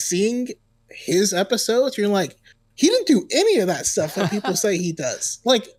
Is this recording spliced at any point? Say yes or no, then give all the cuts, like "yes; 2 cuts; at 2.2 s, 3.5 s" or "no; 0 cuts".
no; 0 cuts